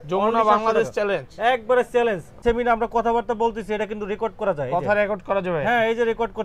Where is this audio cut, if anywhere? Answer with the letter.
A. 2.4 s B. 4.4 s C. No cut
A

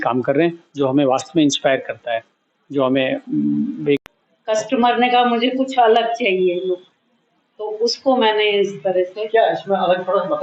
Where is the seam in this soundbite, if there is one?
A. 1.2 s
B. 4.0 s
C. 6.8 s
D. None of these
B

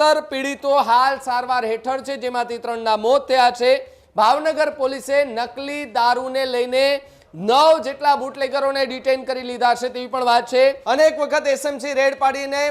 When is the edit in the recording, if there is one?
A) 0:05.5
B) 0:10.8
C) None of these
B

